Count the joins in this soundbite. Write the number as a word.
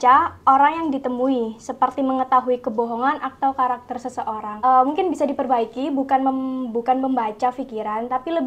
zero